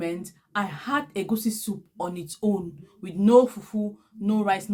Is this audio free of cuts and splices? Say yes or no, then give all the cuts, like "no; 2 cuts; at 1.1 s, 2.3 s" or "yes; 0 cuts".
yes; 0 cuts